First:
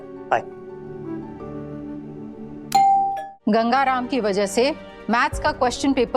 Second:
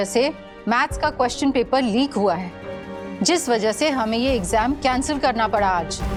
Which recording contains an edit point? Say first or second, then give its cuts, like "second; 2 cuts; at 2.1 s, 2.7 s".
first; 1 cut; at 3.2 s